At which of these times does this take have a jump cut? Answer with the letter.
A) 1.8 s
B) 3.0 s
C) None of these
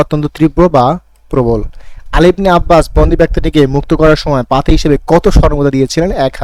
C